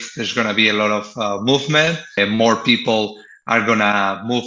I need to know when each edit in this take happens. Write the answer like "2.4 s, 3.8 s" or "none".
2.2 s